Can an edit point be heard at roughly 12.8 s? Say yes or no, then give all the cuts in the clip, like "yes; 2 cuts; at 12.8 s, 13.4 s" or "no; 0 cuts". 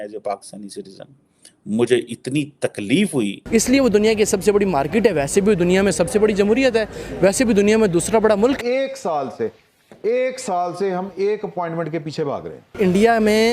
yes; 3 cuts; at 3.4 s, 8.6 s, 12.8 s